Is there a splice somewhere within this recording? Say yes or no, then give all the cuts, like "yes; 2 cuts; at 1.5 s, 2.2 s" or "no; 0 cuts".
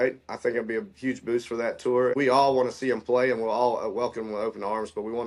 yes; 1 cut; at 2.2 s